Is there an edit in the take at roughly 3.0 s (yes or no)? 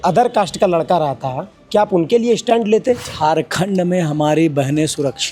yes